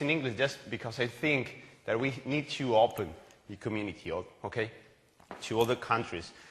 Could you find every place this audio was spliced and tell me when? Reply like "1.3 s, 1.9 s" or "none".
4.5 s